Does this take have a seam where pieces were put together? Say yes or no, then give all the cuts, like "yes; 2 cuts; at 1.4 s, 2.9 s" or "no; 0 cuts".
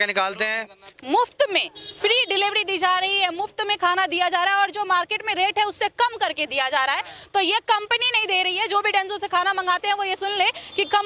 yes; 1 cut; at 1.0 s